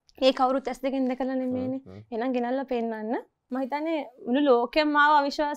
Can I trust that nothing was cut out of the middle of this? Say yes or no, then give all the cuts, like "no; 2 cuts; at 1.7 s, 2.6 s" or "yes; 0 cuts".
no; 1 cut; at 3.4 s